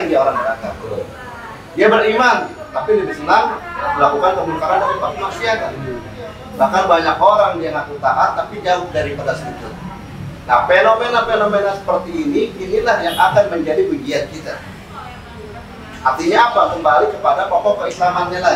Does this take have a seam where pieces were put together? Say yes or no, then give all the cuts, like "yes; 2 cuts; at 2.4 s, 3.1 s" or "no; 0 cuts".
no; 0 cuts